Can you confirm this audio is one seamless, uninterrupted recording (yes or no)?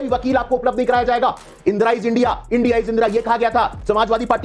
no